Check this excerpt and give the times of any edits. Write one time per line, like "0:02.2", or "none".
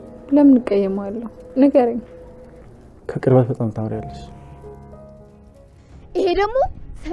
0:05.2